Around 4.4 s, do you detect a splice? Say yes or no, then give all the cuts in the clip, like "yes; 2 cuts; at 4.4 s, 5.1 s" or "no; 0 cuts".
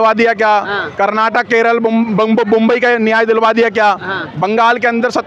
no; 0 cuts